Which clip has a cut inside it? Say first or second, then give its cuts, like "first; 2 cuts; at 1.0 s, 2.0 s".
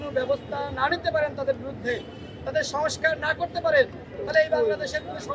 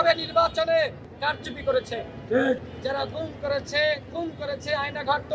second; 1 cut; at 2.7 s